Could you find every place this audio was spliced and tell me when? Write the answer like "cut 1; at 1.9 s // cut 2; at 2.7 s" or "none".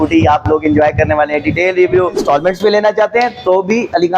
cut 1; at 2.2 s